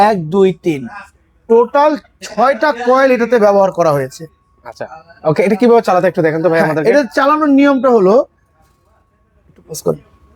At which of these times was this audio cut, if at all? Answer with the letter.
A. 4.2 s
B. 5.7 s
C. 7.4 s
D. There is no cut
D